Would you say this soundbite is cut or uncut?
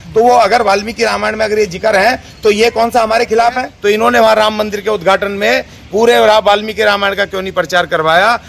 cut